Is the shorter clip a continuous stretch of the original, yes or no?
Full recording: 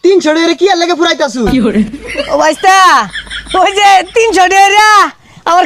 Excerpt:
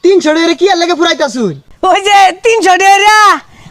no